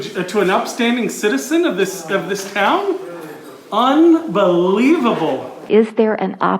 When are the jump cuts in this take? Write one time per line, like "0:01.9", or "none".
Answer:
0:05.6